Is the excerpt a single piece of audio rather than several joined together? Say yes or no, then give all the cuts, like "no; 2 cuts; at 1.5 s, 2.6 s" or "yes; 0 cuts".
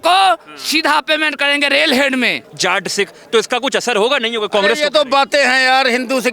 no; 1 cut; at 2.4 s